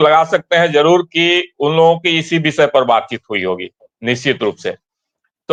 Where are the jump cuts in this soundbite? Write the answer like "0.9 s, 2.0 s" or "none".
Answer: none

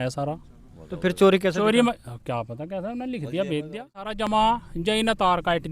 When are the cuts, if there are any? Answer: 4.2 s

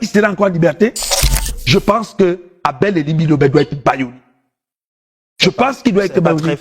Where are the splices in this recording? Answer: 1.6 s

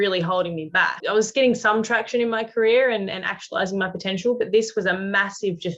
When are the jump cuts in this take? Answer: 1.0 s

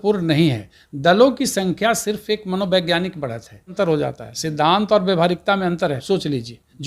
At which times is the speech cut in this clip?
3.7 s, 6.0 s

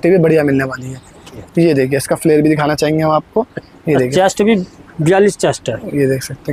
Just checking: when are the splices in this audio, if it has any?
1.4 s

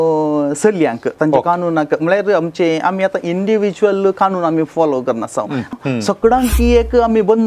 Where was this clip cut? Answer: 5.7 s

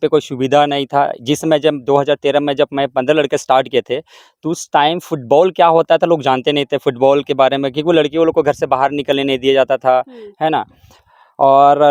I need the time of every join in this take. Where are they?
none

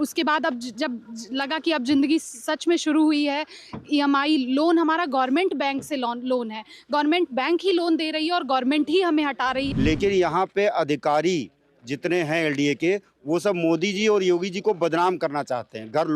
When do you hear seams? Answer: 9.7 s

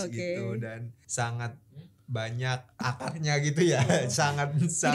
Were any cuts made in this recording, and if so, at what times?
0.9 s, 2.8 s

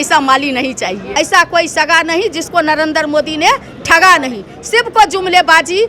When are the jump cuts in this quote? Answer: 1.1 s

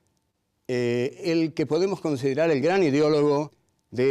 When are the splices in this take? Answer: 2.4 s

